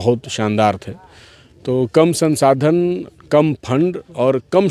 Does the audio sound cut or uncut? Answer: uncut